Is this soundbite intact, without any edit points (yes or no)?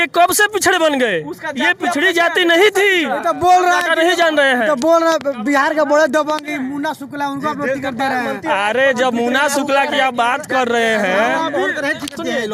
yes